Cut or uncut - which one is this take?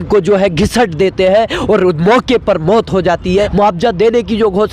cut